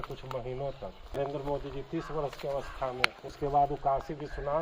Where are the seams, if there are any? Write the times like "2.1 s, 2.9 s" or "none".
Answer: 1.2 s, 3.3 s